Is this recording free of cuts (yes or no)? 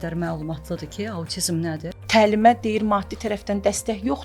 no